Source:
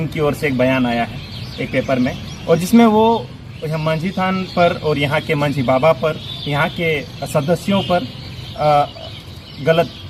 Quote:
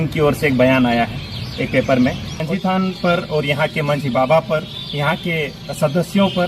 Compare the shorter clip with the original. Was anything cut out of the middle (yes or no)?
yes